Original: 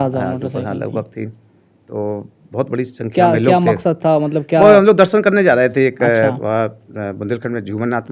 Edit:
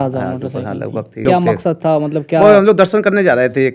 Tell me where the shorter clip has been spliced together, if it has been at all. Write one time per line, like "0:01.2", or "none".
0:01.2